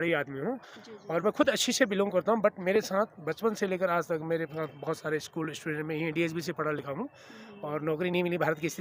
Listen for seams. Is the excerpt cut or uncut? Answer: uncut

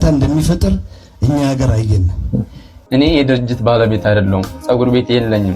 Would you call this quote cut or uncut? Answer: cut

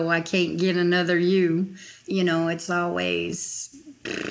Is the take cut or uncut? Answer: uncut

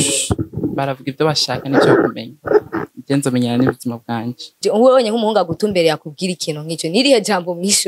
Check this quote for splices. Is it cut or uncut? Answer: cut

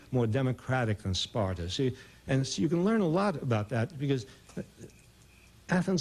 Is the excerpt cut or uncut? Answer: cut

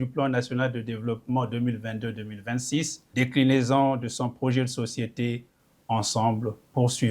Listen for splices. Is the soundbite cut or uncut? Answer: cut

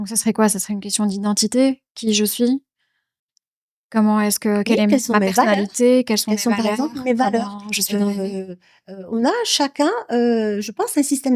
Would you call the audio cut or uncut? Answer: uncut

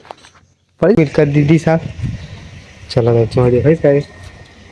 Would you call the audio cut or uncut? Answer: cut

